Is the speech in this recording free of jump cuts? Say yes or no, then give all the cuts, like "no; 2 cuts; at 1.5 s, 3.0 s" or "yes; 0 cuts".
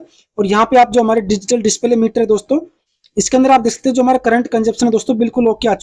yes; 0 cuts